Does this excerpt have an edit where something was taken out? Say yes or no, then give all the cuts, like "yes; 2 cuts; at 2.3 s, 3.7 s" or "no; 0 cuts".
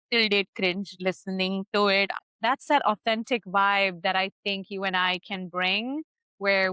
yes; 1 cut; at 2.2 s